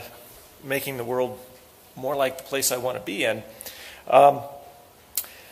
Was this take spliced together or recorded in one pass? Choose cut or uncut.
uncut